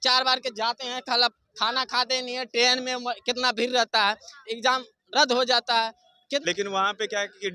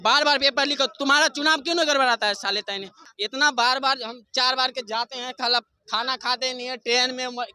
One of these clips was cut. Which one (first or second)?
first